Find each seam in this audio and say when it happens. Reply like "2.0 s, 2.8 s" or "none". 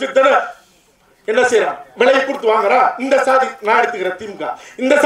none